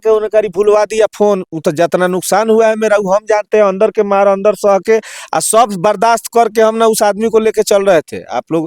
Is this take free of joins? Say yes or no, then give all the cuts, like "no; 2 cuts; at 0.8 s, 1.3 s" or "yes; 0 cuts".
yes; 0 cuts